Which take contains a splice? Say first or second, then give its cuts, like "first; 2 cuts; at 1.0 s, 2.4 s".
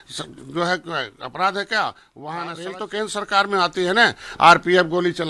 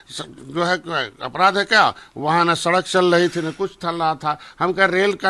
first; 1 cut; at 2.7 s